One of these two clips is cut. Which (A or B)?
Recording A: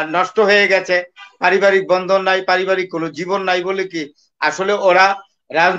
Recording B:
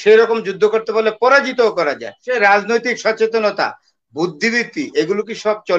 B